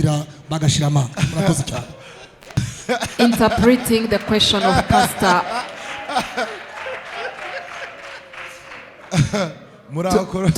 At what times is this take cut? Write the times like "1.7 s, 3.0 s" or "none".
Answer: none

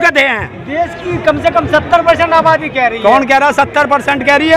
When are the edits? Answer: none

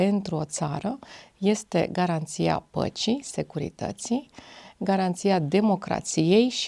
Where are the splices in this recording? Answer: none

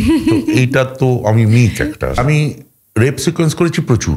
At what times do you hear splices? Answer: 2.2 s

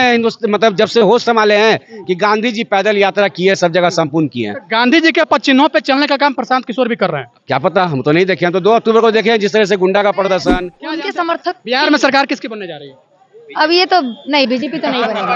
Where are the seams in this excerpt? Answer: 11.0 s

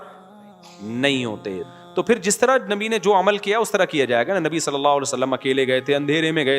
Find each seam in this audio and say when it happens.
1.6 s

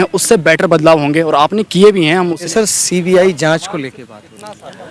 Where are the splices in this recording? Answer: 2.5 s

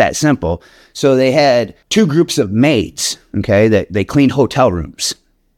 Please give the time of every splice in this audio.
1.8 s

